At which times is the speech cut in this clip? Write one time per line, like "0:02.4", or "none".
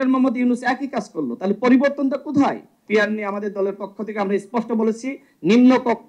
0:02.7